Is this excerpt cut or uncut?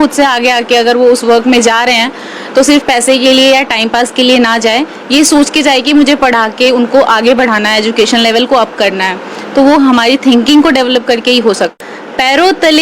cut